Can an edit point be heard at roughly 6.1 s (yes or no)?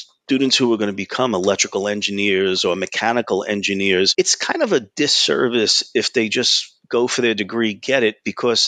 no